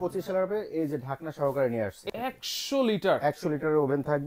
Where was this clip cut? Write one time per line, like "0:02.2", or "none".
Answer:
0:02.0